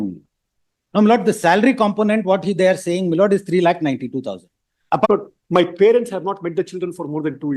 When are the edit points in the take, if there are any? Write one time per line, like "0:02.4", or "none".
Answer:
0:05.1